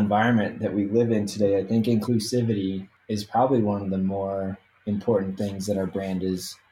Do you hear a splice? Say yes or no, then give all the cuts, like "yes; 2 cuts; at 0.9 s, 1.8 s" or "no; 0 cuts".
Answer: yes; 2 cuts; at 2.0 s, 2.9 s